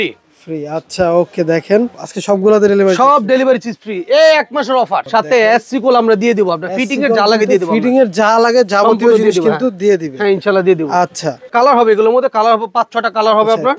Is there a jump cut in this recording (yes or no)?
yes